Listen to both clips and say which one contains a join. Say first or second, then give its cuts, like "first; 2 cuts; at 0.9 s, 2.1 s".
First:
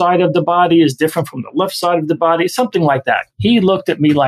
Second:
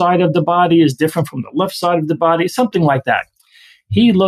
first; 1 cut; at 3.3 s